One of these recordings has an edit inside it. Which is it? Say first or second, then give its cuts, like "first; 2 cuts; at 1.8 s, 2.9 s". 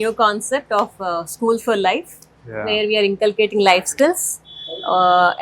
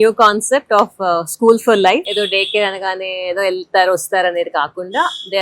second; 1 cut; at 2.1 s